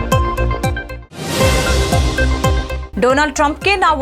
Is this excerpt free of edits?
no; 2 cuts; at 0.9 s, 2.8 s

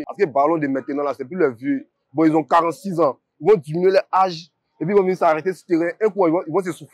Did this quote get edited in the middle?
no; 0 cuts

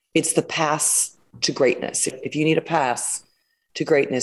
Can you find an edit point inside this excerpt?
yes; 1 cut; at 2.1 s

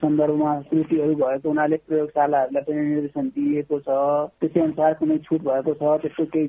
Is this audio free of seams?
yes; 0 cuts

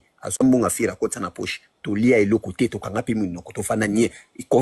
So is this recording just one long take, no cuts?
yes; 0 cuts

